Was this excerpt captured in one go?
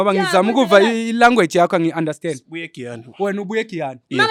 yes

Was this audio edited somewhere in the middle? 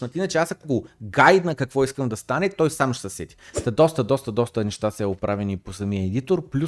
yes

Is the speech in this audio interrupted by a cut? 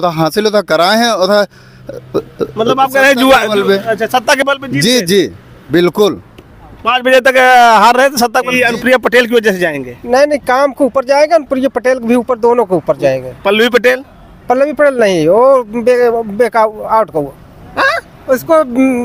yes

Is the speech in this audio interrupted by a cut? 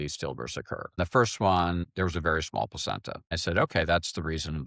yes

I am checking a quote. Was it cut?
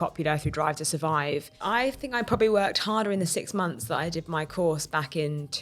yes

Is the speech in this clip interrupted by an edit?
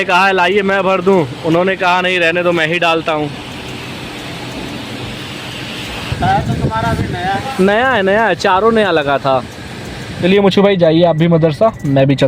no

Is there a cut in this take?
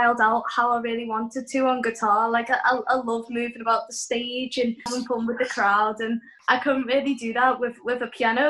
yes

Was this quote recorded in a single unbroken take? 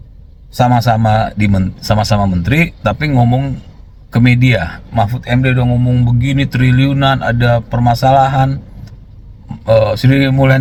yes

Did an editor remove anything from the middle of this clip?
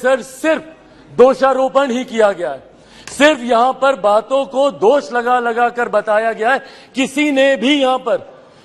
no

